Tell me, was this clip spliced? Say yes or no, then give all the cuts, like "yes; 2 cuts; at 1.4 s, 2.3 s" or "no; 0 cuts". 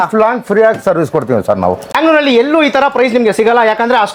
yes; 1 cut; at 2.0 s